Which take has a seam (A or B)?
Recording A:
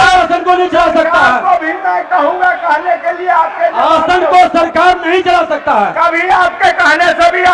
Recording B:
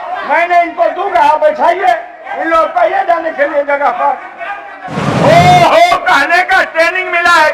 B